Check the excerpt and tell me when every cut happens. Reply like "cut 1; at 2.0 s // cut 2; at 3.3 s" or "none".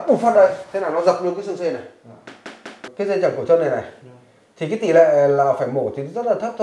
cut 1; at 2.8 s